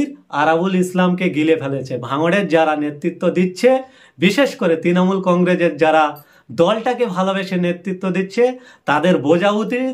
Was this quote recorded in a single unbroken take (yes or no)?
yes